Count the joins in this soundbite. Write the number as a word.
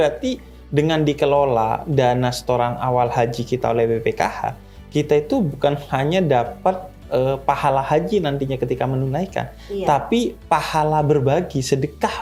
zero